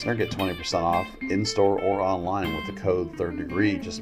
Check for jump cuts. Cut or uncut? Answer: uncut